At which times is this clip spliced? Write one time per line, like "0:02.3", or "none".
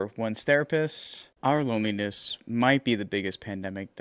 none